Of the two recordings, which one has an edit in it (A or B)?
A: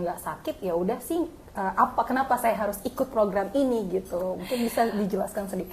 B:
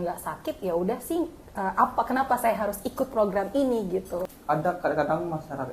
B